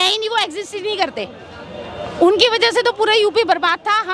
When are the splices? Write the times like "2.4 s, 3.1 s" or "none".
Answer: none